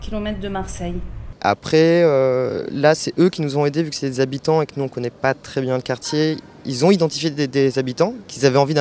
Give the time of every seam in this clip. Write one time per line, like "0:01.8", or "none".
0:01.2